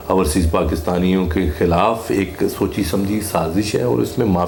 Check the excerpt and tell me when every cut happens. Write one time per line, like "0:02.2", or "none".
none